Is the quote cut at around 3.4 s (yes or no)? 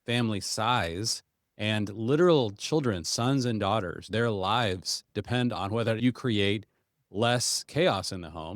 no